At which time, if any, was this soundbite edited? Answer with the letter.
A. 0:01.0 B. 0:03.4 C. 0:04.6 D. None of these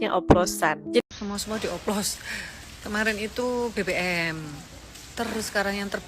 A